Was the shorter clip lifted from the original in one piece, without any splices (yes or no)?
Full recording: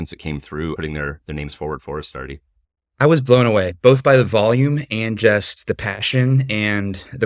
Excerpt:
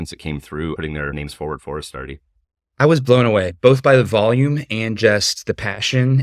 no